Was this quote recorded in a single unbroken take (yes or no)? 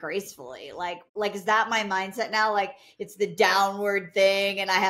no